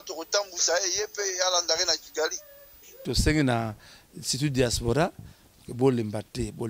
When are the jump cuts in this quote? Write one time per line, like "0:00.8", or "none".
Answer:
0:03.0